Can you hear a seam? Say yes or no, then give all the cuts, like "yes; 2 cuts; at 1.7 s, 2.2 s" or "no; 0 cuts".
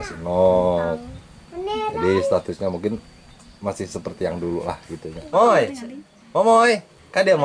yes; 1 cut; at 5.1 s